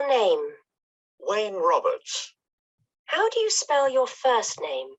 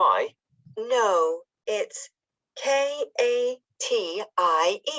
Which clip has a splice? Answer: second; 2 cuts; at 3.1 s, 4.1 s

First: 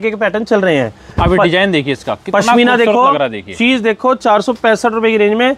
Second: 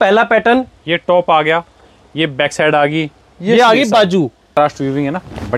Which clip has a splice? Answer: second; 1 cut; at 4.5 s

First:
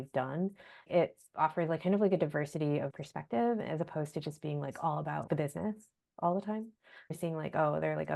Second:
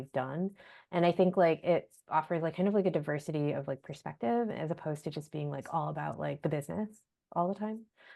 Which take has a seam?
first; 4 cuts; at 0.9 s, 3.0 s, 5.2 s, 7.2 s

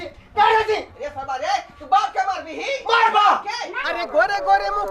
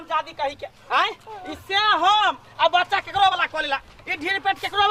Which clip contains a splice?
first; 1 cut; at 3.8 s

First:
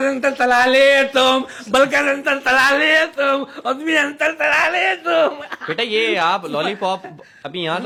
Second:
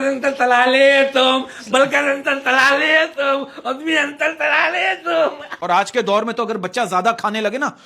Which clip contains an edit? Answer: second; 1 cut; at 5.5 s

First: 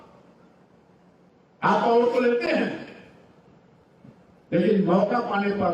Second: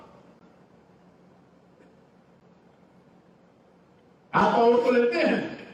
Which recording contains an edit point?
first; 1 cut; at 1.3 s

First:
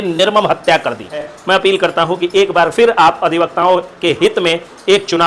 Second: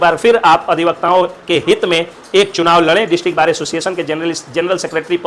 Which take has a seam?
first; 1 cut; at 1.3 s

